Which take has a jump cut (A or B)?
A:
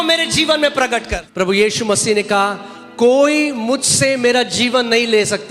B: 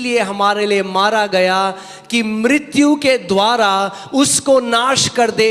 A